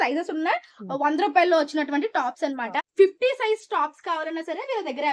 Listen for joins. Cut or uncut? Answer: cut